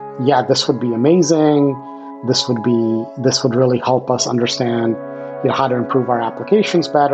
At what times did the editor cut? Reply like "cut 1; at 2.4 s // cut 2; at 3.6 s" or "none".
none